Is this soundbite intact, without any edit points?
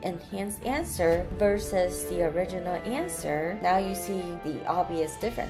yes; 0 cuts

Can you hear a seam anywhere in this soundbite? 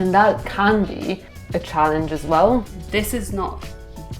yes; 2 cuts; at 1.3 s, 2.8 s

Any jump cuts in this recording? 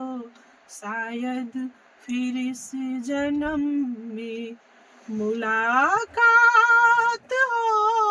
no; 0 cuts

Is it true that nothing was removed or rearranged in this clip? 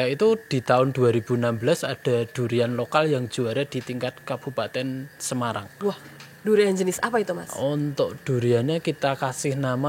yes; 0 cuts

